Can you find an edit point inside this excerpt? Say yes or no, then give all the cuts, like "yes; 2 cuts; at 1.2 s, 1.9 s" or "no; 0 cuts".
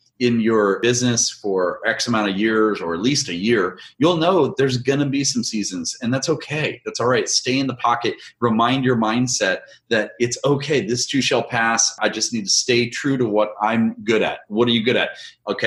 no; 0 cuts